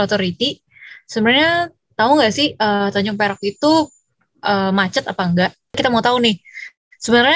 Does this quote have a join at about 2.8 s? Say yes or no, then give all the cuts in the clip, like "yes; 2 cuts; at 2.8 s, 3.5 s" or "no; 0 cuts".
no; 1 cut; at 5.8 s